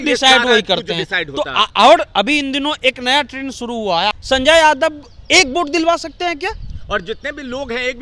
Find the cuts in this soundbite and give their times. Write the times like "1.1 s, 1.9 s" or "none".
4.1 s